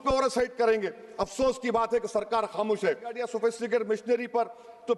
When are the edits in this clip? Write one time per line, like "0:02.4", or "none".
0:03.2